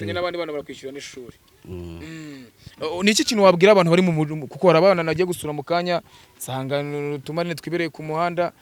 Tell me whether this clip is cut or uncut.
uncut